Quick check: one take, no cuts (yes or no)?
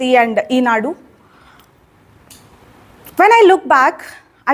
yes